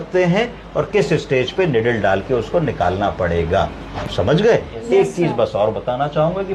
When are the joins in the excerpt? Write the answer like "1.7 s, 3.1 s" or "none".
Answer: none